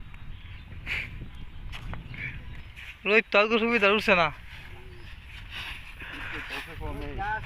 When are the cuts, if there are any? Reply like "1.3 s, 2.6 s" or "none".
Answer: 2.6 s